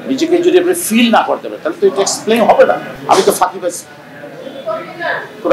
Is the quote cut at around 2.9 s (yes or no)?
yes